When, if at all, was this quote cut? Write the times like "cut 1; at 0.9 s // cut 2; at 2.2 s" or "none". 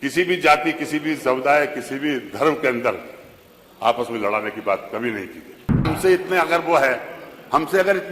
cut 1; at 5.9 s